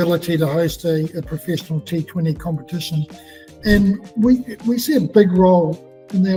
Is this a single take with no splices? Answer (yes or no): yes